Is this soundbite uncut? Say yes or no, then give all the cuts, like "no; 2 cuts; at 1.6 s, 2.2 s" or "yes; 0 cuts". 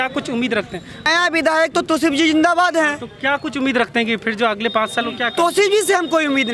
no; 1 cut; at 1.0 s